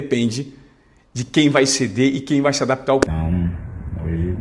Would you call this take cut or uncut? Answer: cut